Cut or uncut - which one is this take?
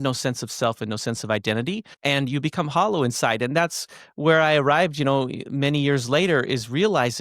cut